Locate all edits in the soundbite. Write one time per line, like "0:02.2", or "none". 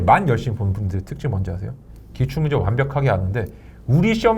none